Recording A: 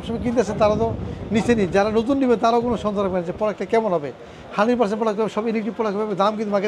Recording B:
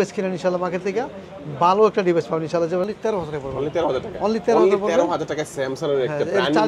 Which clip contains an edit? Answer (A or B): B